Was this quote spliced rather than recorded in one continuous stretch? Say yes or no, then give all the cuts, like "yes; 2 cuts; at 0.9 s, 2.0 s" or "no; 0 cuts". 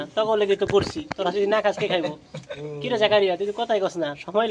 yes; 1 cut; at 3.0 s